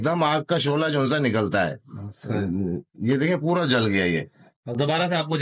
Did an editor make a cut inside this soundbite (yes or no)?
yes